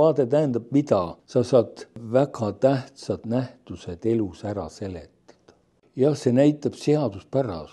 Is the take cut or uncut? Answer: cut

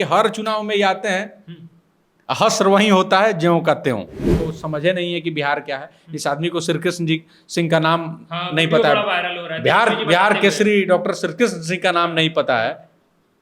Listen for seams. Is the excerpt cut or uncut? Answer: cut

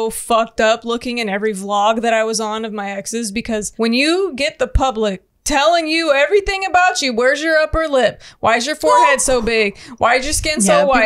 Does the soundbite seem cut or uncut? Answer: cut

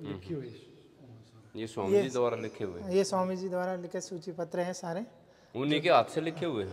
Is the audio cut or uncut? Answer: uncut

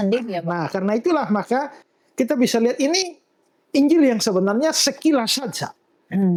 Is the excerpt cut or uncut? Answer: uncut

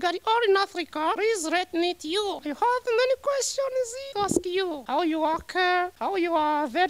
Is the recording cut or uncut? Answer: cut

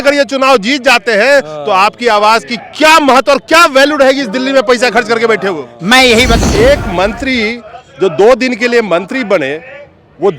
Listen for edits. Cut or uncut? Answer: cut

